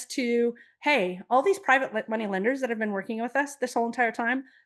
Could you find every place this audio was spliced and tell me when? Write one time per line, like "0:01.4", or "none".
none